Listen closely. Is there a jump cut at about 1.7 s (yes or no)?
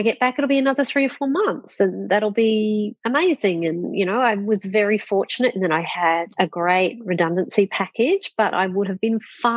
no